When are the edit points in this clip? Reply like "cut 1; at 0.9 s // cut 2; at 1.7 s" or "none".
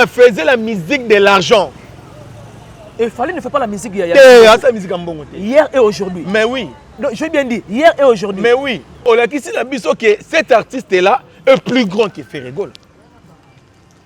cut 1; at 9.1 s